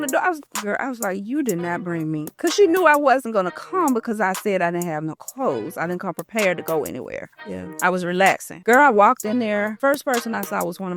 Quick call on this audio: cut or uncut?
cut